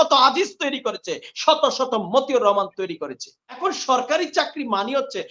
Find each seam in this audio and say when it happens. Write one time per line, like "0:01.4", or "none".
0:03.6